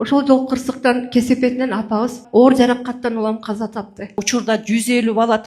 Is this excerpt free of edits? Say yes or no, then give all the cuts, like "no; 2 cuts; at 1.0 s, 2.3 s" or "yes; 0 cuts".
no; 2 cuts; at 2.2 s, 4.2 s